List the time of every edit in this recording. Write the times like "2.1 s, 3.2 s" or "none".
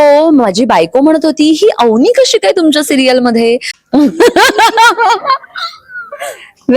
3.7 s